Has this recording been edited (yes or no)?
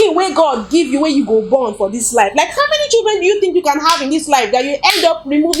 no